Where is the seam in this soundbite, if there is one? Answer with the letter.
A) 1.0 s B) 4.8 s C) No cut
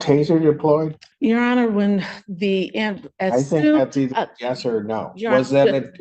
A